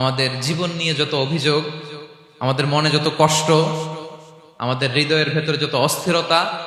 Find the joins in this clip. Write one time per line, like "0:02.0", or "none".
none